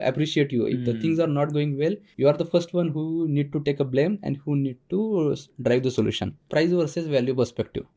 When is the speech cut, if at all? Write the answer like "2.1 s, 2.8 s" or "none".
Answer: 2.1 s, 6.5 s